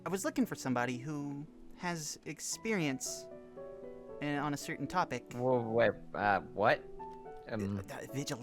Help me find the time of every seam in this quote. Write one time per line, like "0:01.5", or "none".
0:07.3